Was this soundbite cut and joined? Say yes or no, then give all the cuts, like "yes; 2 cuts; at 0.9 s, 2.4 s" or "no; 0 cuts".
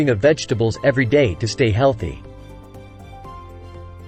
no; 0 cuts